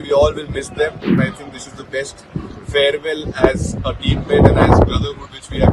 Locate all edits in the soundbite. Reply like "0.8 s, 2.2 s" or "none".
1.1 s